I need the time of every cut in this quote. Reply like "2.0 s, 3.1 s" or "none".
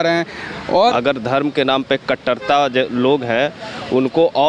0.9 s

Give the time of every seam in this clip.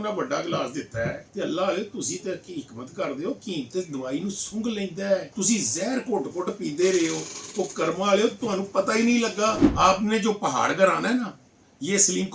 1.2 s, 5.3 s, 9.6 s

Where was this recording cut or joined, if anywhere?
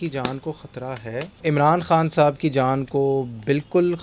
1.4 s

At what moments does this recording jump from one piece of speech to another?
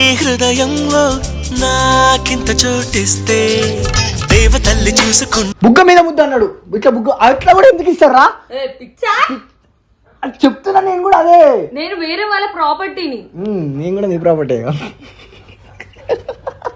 5.4 s

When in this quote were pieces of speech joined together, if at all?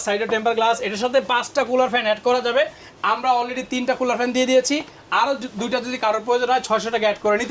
none

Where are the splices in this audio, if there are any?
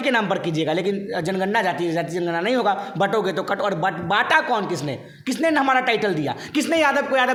none

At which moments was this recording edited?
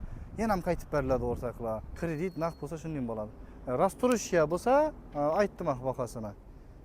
1.9 s

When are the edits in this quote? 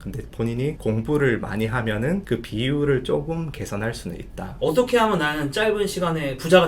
4.6 s

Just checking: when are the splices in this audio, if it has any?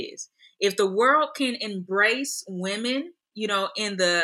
none

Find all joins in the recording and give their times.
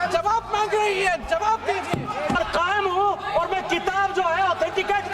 2.4 s

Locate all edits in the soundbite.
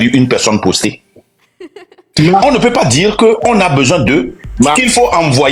none

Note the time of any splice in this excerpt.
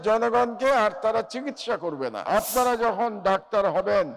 2.3 s

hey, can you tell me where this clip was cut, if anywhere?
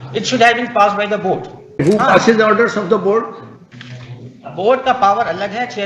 1.8 s

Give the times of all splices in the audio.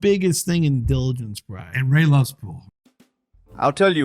2.8 s

